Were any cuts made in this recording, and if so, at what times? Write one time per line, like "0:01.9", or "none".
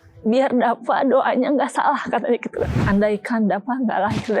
0:02.8